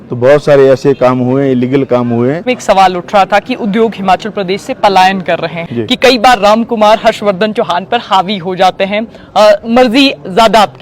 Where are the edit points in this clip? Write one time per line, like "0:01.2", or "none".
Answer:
0:02.4
0:05.7